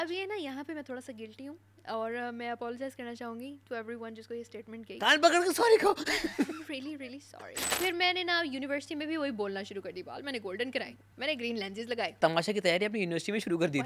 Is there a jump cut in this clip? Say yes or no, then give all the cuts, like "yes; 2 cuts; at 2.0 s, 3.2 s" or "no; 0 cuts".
yes; 3 cuts; at 7.7 s, 11.0 s, 12.2 s